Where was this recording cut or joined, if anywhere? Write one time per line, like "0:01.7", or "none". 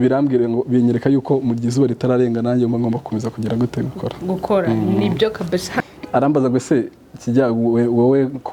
0:05.8

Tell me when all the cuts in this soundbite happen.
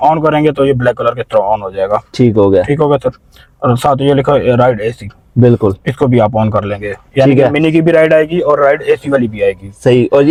none

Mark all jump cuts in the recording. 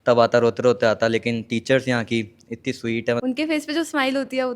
0:03.2

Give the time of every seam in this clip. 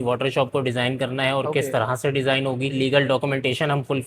0:02.8

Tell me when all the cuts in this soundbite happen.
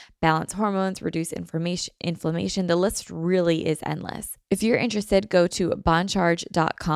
0:04.3

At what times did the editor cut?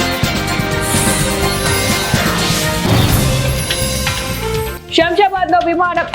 0:01.0
0:04.8

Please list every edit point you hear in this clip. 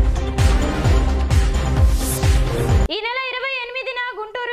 0:02.9

